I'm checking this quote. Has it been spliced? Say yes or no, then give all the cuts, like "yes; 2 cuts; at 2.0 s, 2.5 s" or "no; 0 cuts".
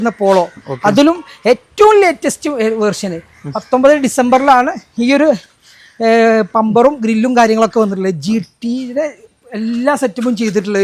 no; 0 cuts